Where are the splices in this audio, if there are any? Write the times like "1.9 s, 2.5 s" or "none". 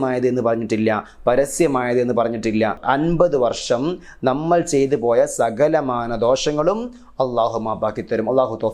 2.8 s